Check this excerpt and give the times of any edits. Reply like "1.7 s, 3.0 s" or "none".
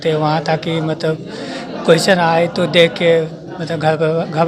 none